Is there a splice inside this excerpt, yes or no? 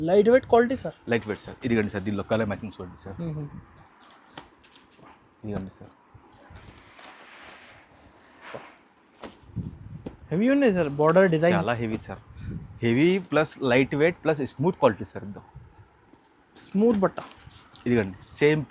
no